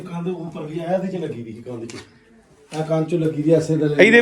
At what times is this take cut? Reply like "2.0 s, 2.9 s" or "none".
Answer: none